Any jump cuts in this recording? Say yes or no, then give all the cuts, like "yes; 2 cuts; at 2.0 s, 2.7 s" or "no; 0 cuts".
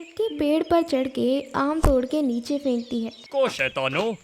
yes; 1 cut; at 3.2 s